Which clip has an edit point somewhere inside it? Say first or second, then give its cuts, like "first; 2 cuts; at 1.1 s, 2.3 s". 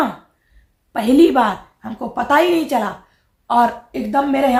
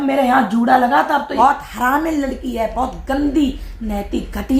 second; 1 cut; at 1.3 s